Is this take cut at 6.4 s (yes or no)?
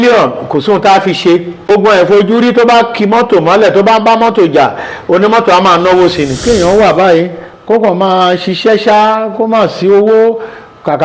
yes